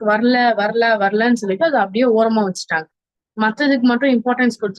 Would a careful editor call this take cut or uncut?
uncut